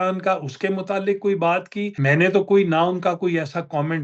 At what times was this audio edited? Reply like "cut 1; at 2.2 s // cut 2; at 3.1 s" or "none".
cut 1; at 1.8 s